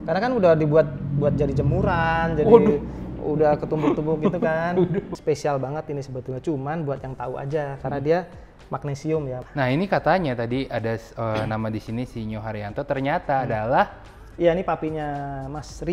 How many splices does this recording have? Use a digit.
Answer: 2